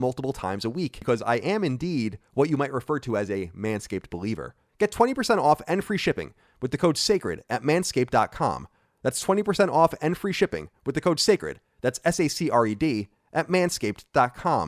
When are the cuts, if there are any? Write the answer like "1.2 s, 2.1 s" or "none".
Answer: 1.0 s, 4.6 s